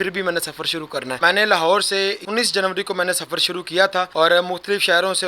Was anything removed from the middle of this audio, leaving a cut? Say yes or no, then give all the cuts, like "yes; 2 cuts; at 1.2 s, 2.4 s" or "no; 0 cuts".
yes; 3 cuts; at 1.2 s, 2.2 s, 4.1 s